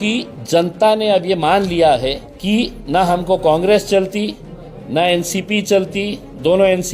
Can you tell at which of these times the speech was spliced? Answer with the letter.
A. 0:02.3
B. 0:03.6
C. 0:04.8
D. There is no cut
A